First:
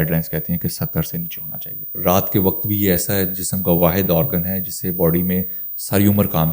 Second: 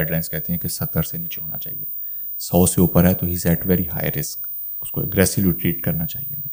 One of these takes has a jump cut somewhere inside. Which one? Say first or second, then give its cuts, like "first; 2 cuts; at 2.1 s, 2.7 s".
first; 1 cut; at 1.9 s